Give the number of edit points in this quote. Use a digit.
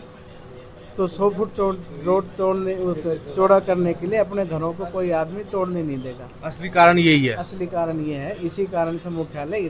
0